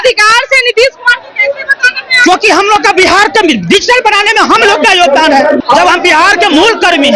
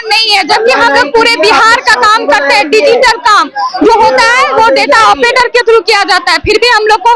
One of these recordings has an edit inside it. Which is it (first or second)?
first